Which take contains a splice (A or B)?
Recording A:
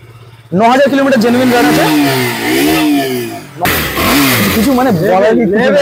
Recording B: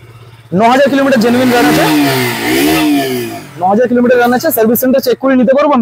A